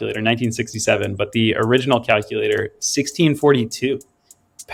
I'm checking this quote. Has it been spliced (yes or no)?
no